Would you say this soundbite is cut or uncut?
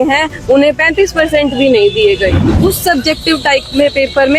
cut